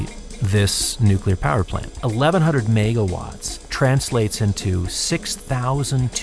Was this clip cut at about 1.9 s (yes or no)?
yes